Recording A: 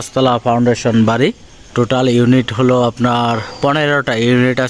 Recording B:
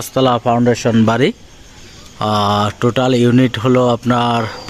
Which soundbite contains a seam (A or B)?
A